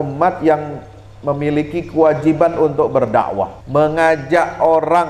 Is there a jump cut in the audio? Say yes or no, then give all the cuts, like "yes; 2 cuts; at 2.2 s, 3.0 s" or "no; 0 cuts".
yes; 1 cut; at 3.6 s